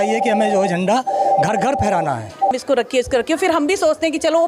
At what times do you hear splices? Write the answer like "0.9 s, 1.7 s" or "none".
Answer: 2.5 s